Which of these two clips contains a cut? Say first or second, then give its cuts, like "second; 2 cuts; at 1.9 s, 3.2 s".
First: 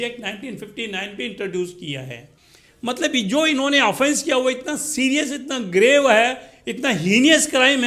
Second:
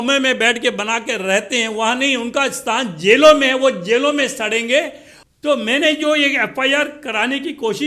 second; 1 cut; at 5.2 s